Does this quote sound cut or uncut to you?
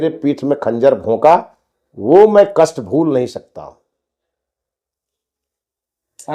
uncut